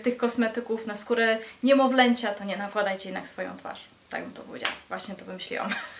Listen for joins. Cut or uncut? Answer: uncut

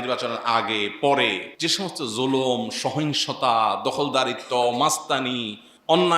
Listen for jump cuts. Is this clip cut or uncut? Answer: cut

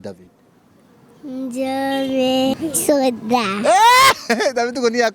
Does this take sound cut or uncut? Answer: cut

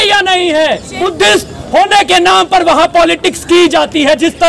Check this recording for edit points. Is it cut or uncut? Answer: cut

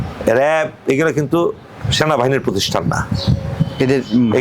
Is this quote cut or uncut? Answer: uncut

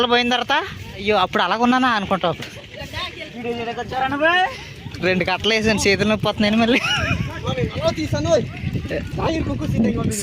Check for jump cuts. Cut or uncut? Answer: cut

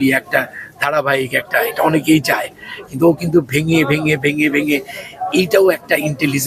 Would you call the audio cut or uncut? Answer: uncut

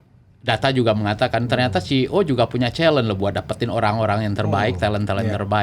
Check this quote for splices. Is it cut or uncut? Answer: uncut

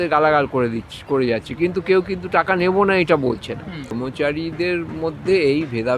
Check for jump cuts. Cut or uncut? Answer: cut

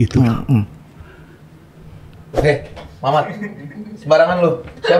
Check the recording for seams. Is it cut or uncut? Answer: cut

